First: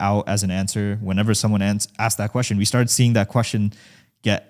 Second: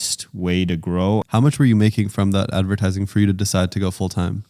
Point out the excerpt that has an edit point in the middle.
second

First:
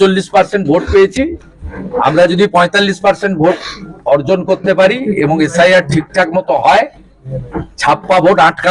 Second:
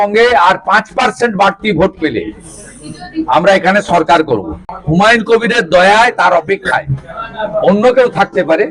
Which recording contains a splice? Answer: second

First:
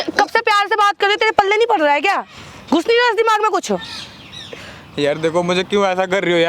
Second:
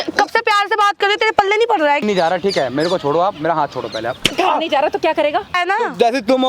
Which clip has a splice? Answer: second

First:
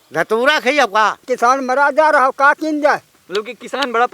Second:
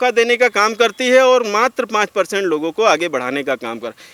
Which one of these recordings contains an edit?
first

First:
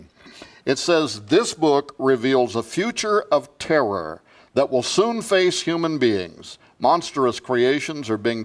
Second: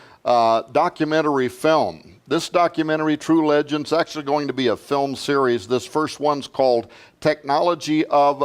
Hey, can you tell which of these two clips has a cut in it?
second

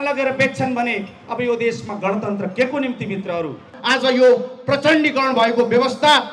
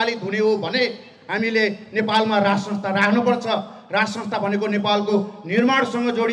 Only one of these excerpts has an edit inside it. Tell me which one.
first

